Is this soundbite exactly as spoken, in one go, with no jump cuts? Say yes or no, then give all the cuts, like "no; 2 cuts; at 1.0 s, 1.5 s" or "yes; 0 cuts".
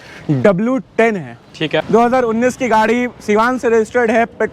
no; 1 cut; at 1.8 s